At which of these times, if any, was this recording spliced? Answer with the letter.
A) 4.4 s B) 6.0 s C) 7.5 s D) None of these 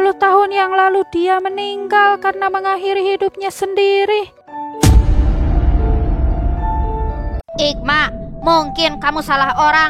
D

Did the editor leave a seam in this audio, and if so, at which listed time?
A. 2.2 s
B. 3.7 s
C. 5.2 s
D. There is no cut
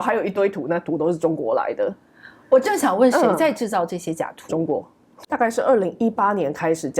C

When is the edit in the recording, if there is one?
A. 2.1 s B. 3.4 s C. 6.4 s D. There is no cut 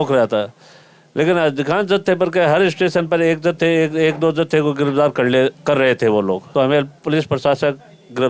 C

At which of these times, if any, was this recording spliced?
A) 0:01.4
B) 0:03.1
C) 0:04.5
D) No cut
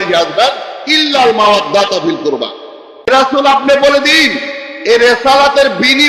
B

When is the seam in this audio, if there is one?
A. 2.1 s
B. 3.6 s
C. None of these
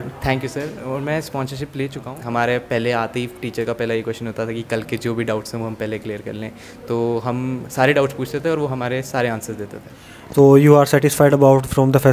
A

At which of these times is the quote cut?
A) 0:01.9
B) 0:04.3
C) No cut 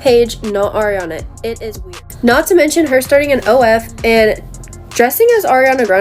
A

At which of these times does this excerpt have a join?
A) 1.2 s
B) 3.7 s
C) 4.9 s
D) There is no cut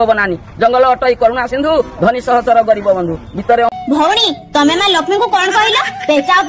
B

